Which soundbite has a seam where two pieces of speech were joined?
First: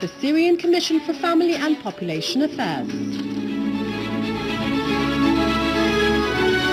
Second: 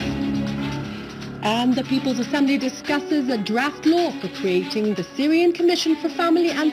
second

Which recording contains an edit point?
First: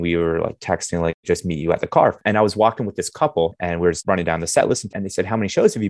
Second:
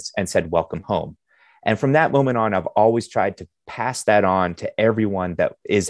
first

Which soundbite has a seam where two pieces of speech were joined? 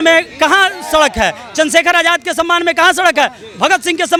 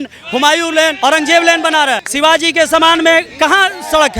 second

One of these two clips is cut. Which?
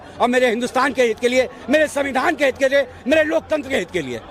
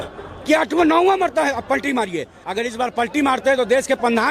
second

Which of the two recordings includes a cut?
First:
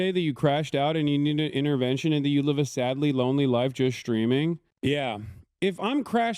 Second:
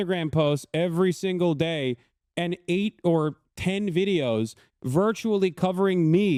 first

